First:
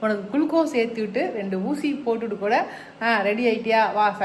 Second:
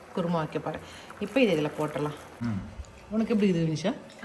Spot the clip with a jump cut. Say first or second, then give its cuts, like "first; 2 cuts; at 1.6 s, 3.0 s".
second; 1 cut; at 2.4 s